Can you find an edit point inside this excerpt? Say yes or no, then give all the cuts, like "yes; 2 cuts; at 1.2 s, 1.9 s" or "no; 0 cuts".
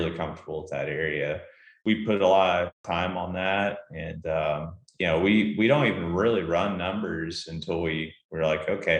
yes; 2 cuts; at 1.7 s, 2.8 s